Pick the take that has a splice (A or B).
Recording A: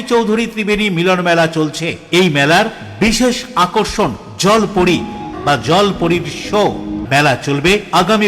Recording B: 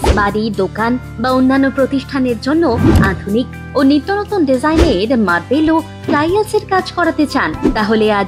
A